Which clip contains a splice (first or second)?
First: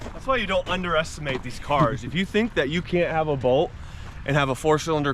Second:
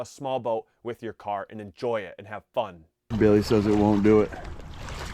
second